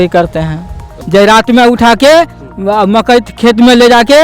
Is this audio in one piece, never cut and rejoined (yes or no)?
no